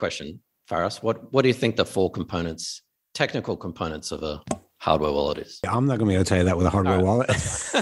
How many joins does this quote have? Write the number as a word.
one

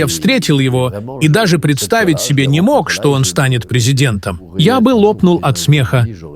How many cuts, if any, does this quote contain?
one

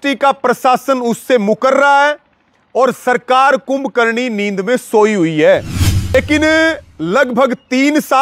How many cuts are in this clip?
one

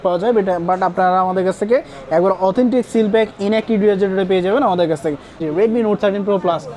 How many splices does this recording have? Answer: one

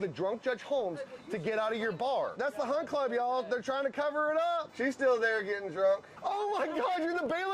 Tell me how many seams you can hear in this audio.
three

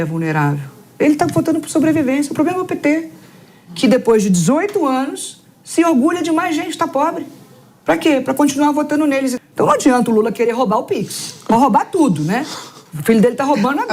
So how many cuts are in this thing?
one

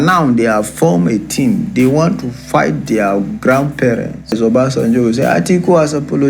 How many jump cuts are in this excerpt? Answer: one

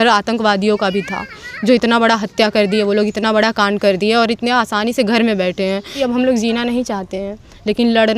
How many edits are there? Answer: one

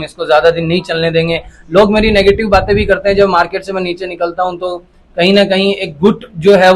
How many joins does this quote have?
zero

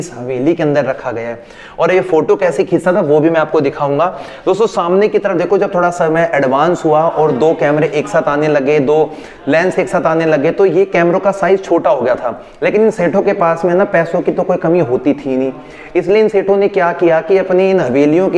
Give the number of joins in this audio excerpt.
zero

